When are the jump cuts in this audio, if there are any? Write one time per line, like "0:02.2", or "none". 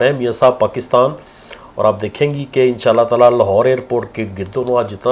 none